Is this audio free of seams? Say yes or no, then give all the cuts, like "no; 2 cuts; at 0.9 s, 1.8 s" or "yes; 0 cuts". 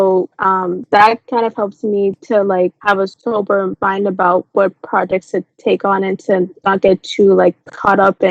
yes; 0 cuts